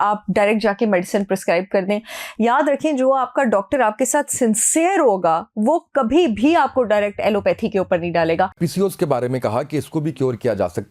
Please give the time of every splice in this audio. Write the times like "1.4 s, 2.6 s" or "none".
8.6 s